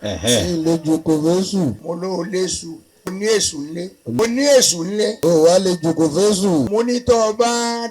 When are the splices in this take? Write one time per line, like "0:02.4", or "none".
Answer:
0:01.8
0:03.1
0:04.2
0:05.2
0:06.7